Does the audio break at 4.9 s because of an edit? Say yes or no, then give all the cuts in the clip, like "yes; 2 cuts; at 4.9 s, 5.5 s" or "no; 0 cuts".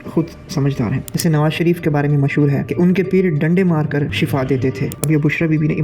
yes; 2 cuts; at 1.1 s, 4.9 s